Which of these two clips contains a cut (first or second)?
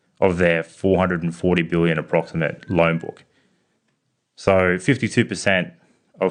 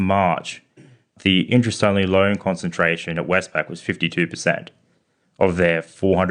second